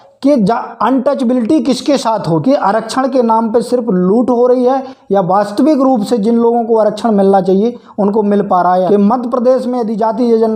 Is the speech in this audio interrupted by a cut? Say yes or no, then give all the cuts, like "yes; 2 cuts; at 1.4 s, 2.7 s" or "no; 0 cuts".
yes; 2 cuts; at 2.4 s, 8.9 s